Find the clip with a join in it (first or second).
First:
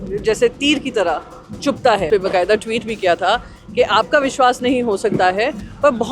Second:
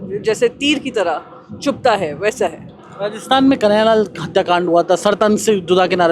first